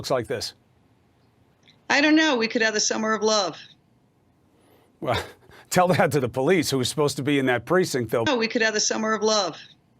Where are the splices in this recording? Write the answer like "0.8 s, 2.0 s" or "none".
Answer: 4.5 s, 8.3 s